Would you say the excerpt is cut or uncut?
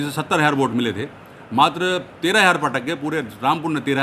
uncut